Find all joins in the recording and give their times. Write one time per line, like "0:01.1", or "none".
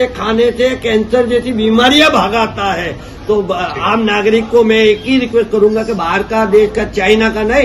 none